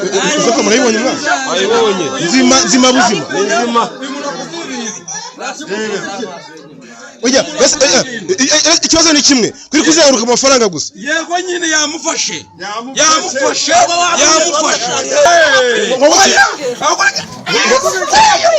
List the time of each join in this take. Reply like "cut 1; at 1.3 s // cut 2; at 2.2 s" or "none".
cut 1; at 15.3 s